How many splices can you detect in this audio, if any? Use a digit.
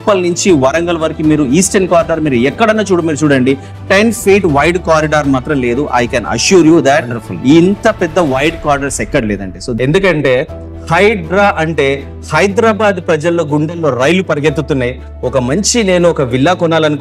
1